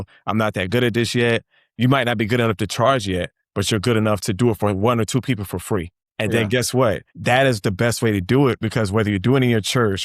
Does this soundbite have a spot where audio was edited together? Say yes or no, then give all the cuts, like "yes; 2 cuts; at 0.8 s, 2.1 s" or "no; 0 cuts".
yes; 2 cuts; at 6.0 s, 7.1 s